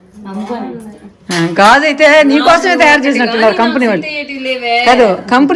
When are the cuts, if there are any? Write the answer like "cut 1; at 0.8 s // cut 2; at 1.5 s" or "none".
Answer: none